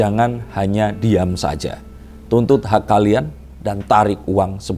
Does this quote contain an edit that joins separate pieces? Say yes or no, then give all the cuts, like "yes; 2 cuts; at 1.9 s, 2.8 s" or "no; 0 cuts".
no; 0 cuts